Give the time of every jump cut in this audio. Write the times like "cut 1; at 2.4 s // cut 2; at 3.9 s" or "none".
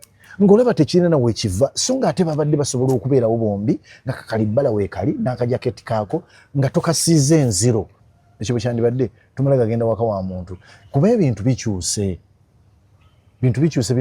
cut 1; at 8.0 s